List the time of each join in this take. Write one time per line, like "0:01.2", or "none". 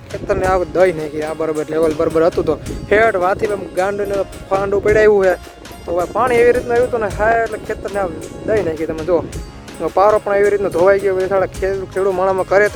none